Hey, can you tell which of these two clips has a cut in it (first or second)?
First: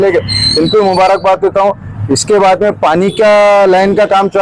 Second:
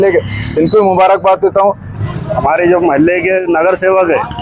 second